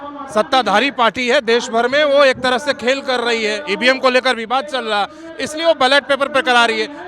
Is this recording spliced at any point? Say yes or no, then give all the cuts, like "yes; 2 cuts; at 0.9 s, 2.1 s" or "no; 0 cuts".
no; 0 cuts